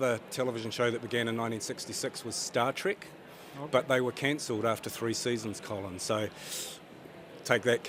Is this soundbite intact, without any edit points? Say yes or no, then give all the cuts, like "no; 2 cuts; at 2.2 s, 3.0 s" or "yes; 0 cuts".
yes; 0 cuts